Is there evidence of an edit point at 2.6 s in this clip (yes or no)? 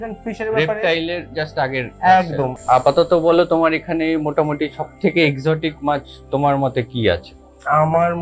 yes